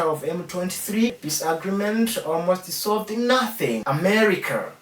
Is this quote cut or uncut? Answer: cut